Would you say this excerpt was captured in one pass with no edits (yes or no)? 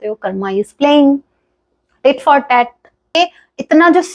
no